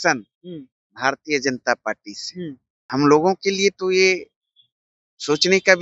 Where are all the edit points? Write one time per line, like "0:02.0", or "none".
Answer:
0:02.7